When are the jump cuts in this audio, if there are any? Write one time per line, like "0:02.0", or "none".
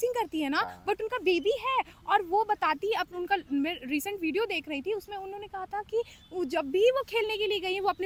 none